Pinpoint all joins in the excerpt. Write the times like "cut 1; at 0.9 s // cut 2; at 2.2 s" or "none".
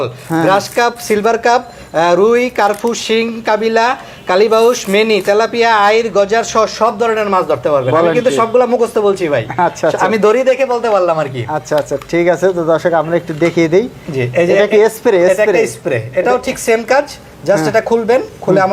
none